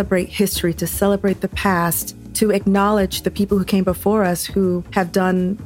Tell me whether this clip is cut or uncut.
uncut